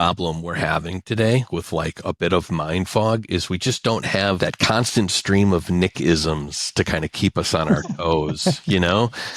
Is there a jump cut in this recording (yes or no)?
yes